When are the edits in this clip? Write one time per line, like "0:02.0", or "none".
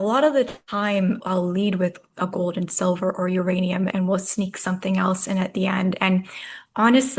0:01.2
0:03.9